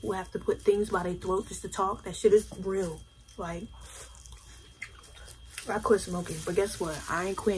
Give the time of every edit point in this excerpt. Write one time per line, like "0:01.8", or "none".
none